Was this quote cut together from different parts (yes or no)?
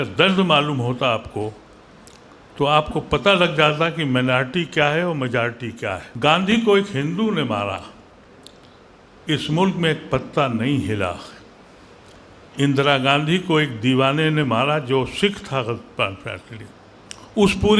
yes